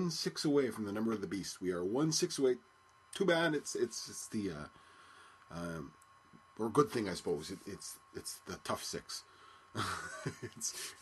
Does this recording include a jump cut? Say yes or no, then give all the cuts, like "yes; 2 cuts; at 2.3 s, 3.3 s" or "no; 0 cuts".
no; 0 cuts